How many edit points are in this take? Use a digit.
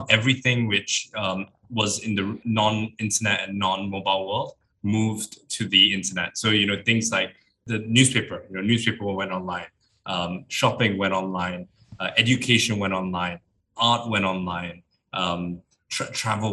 2